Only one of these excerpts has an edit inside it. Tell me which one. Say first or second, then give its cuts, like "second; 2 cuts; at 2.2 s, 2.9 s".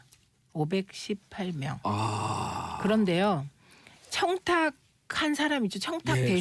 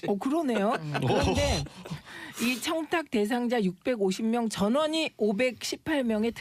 second; 1 cut; at 1.7 s